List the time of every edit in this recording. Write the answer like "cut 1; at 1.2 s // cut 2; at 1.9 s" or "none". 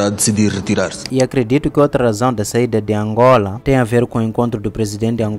cut 1; at 1.0 s